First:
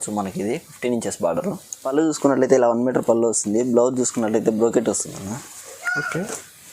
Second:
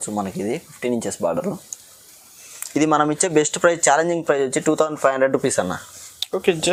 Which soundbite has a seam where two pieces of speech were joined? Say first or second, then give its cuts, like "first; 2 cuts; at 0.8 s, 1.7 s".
first; 1 cut; at 1.9 s